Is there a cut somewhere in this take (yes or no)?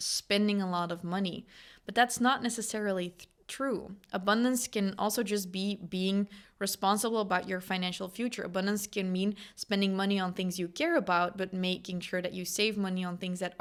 no